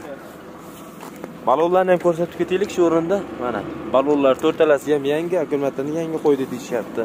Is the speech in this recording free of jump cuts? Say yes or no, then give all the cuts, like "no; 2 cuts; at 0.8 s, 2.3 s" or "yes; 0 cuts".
yes; 0 cuts